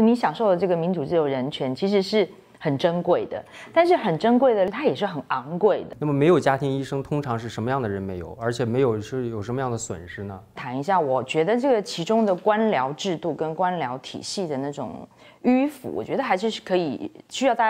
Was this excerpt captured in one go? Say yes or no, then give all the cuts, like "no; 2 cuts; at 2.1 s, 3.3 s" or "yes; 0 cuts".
no; 3 cuts; at 4.7 s, 5.9 s, 10.6 s